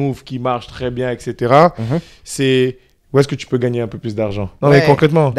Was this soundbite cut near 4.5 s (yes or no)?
yes